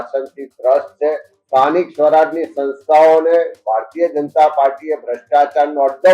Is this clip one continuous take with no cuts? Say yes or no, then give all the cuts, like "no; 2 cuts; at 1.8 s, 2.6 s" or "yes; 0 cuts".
no; 1 cut; at 1.3 s